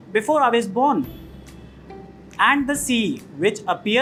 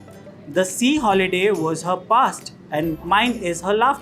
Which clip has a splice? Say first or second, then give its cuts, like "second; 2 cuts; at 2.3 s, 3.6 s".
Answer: second; 1 cut; at 2.9 s